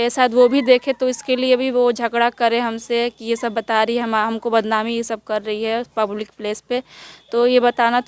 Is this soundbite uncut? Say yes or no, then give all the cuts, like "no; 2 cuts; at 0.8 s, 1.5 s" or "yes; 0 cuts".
yes; 0 cuts